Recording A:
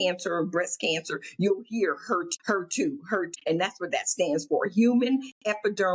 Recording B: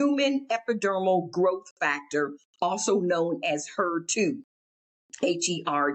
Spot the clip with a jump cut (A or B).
A